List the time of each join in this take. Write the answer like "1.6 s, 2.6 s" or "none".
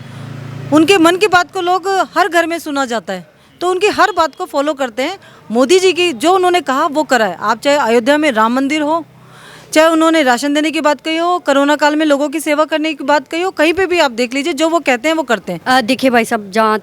15.5 s